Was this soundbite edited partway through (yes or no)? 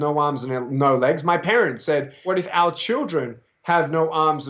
yes